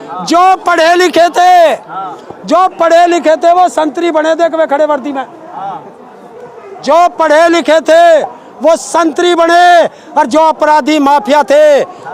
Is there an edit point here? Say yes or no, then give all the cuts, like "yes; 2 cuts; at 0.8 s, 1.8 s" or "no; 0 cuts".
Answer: no; 0 cuts